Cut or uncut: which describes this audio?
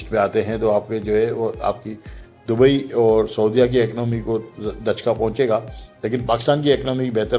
uncut